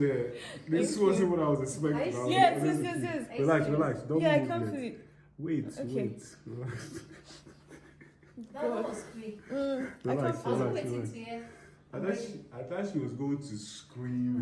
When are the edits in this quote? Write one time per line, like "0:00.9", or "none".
none